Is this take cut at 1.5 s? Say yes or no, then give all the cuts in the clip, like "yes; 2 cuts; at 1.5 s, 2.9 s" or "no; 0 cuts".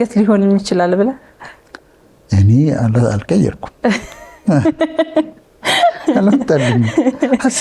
no; 0 cuts